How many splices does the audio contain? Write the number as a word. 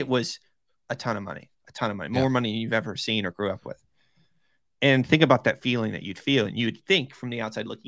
zero